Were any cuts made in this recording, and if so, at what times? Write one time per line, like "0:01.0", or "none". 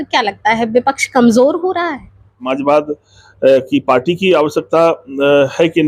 0:02.5